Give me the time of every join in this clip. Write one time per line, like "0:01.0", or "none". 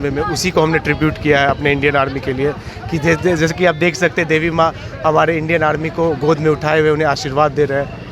none